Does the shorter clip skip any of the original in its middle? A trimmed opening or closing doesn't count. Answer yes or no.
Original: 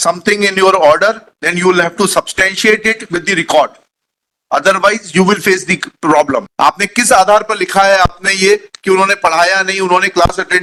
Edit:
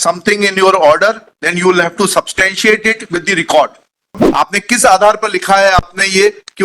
yes